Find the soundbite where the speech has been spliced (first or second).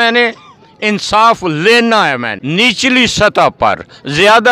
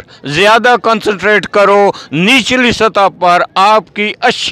first